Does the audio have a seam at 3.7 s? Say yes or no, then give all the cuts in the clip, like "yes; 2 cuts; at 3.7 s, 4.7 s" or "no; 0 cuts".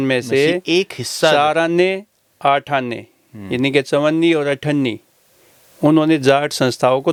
no; 0 cuts